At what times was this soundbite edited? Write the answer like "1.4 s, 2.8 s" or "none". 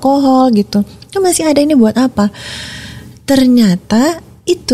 none